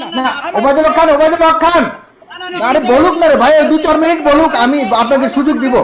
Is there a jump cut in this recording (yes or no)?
no